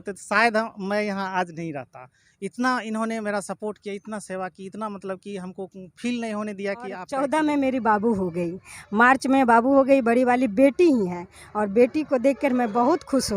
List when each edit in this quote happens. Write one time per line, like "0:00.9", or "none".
0:07.0